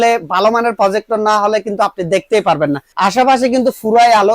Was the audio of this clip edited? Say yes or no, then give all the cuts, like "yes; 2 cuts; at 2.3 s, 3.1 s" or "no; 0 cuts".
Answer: yes; 1 cut; at 2.9 s